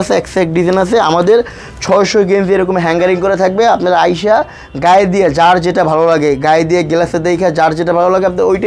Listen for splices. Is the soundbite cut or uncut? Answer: uncut